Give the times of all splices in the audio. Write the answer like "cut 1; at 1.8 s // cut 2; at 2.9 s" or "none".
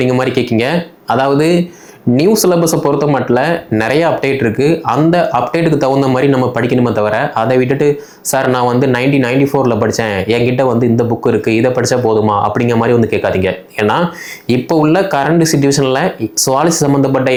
none